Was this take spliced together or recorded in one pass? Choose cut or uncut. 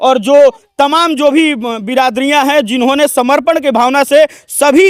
uncut